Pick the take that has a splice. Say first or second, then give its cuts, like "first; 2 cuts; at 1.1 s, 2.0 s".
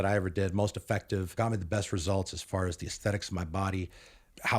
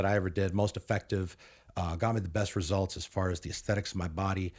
first; 1 cut; at 1.3 s